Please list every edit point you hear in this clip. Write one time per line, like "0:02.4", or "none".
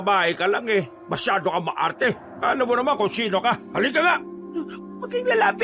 0:01.0
0:02.3
0:03.7
0:04.4